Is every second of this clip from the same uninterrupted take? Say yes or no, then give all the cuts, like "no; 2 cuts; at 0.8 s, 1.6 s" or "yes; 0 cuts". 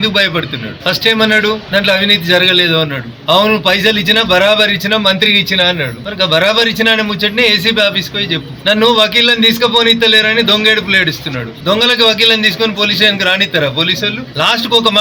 yes; 0 cuts